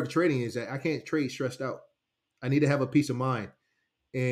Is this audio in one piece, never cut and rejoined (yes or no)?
yes